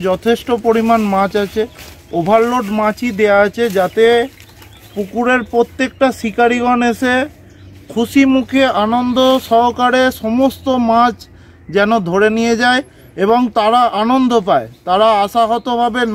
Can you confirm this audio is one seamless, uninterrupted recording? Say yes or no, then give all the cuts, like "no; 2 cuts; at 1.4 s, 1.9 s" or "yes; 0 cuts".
yes; 0 cuts